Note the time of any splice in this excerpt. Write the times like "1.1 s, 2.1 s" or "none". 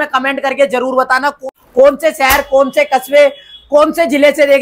1.5 s